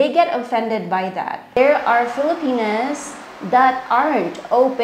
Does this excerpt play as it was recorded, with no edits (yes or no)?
no